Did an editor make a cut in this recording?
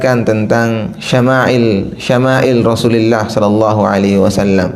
no; 0 cuts

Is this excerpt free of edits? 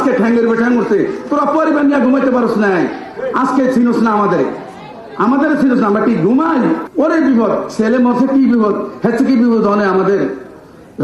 no; 1 cut; at 6.9 s

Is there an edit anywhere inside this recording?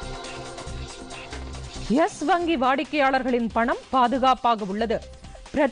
yes; 1 cut; at 1.2 s

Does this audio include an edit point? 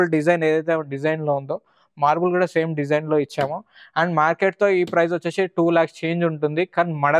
no; 0 cuts

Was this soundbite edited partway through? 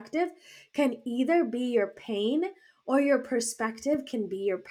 no; 0 cuts

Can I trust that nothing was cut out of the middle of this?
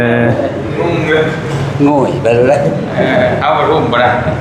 yes; 0 cuts

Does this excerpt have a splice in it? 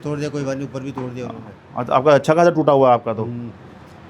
no; 0 cuts

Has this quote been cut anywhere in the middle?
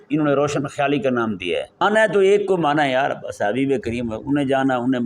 yes; 1 cut; at 1.8 s

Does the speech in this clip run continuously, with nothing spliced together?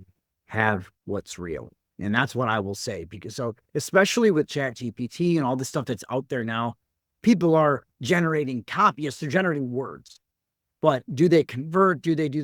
yes; 0 cuts

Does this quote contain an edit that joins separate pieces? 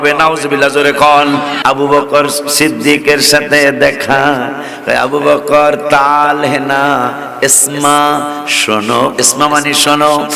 yes; 1 cut; at 1.6 s

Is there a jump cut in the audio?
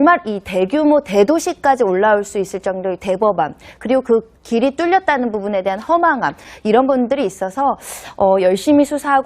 yes; 1 cut; at 3.7 s

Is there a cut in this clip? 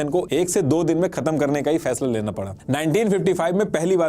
yes; 1 cut; at 2.5 s

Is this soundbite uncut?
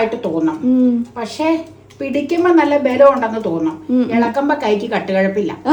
yes; 0 cuts

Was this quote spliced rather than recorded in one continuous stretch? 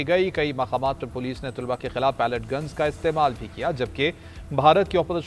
no; 0 cuts

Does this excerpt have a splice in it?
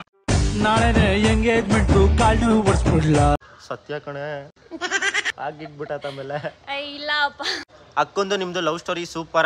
no; 0 cuts

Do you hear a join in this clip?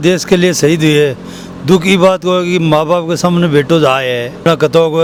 no; 0 cuts

